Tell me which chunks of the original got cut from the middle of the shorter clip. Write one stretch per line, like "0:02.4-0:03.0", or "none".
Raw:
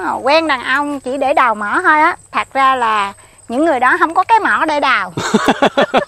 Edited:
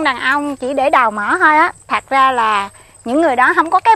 none